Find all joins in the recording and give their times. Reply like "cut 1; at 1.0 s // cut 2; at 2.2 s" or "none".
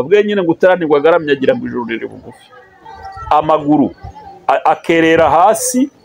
cut 1; at 2.8 s